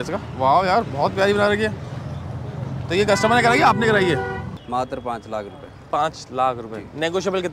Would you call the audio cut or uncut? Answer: cut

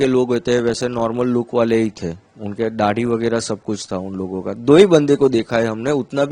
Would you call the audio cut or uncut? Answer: uncut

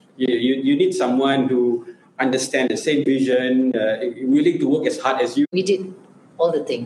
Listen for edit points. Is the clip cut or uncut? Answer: cut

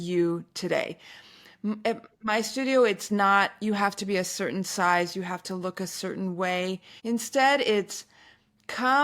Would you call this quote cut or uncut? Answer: cut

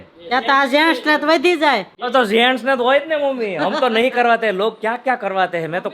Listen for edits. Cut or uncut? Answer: uncut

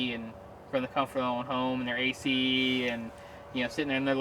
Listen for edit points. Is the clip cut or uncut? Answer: uncut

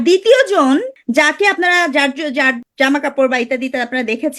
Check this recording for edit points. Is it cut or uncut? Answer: cut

